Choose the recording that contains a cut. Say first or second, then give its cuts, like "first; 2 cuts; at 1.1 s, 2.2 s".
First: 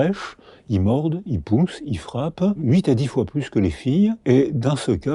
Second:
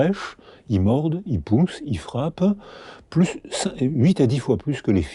first; 2 cuts; at 2.6 s, 4.2 s